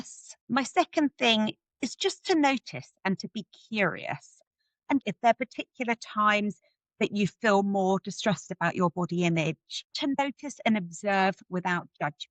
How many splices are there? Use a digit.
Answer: 2